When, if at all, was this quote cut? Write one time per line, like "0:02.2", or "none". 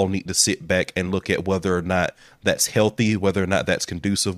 none